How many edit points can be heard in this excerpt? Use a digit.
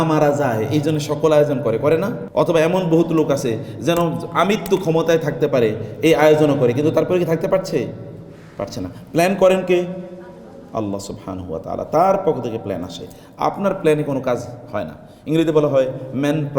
1